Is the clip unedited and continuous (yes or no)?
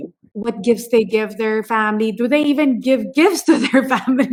yes